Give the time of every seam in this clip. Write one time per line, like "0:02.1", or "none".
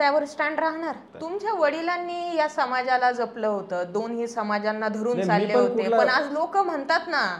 0:01.1